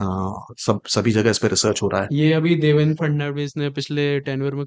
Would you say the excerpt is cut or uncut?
uncut